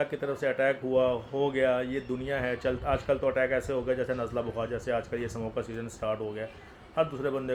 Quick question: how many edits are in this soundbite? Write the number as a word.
zero